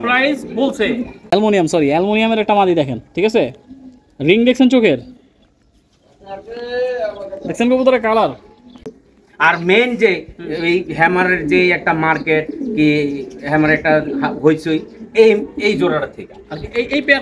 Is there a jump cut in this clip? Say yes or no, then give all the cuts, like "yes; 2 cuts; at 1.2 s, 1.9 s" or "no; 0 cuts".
yes; 2 cuts; at 1.1 s, 8.9 s